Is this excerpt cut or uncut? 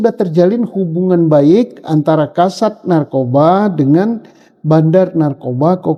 uncut